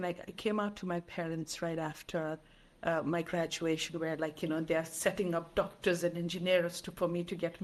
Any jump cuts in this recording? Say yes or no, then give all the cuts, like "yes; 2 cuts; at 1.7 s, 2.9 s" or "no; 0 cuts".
no; 0 cuts